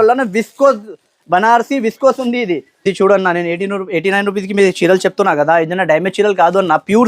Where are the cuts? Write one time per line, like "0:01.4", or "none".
0:02.8